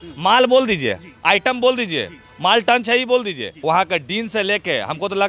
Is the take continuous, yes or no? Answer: no